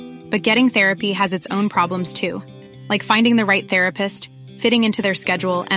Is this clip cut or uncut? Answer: uncut